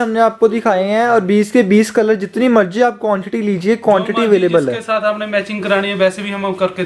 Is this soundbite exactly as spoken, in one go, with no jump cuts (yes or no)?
yes